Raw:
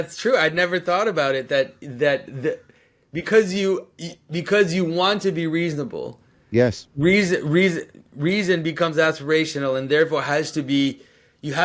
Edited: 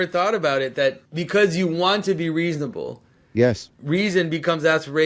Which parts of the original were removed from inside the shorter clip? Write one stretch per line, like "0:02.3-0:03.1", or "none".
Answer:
0:01.8-0:04.3
0:06.8-0:08.0